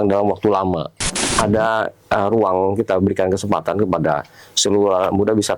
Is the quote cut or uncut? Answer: cut